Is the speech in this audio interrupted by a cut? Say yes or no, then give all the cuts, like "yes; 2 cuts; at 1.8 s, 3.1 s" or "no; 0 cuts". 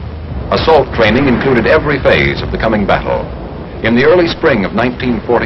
yes; 1 cut; at 2.9 s